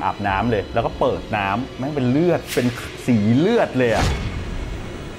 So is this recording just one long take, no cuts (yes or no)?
yes